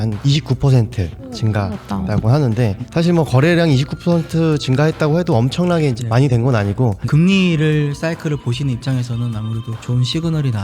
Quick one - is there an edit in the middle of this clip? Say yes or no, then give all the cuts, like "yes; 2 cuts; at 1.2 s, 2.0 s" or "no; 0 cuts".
yes; 1 cut; at 7.0 s